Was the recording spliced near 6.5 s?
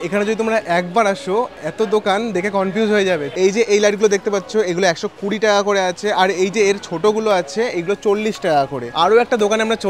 no; 2 cuts; at 3.3 s, 8.8 s

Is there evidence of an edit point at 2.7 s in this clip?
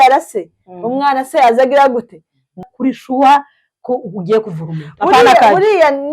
yes; 1 cut; at 2.7 s

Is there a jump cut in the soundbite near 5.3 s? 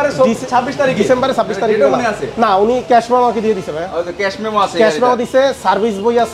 no; 0 cuts

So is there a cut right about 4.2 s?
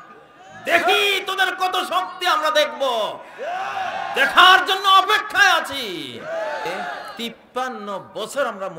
no; 1 cut; at 7.1 s

